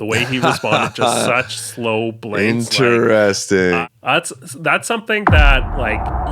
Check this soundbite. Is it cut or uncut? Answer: cut